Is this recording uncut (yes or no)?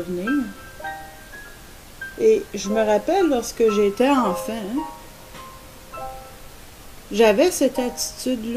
yes